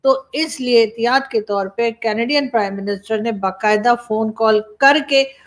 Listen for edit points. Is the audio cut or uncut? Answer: uncut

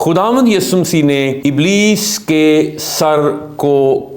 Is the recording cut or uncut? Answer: cut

